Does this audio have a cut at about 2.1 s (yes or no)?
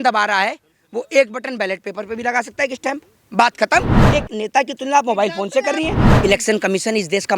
no